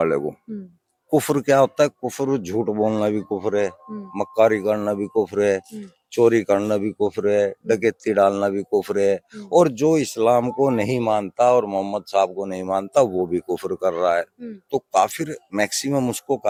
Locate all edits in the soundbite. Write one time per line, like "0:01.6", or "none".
none